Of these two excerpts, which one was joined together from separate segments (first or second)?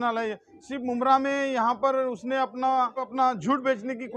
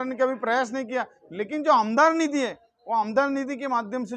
first